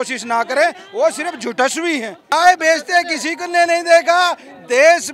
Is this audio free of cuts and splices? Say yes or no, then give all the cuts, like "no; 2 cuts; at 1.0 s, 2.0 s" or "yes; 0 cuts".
no; 1 cut; at 2.3 s